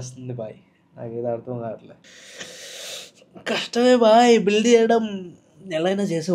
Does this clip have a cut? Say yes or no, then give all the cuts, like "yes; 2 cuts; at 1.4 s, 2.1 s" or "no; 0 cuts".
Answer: yes; 1 cut; at 2.1 s